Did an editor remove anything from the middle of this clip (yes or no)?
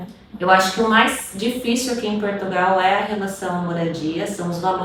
no